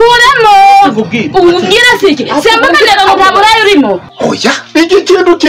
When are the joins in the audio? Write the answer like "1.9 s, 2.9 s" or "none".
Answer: 4.0 s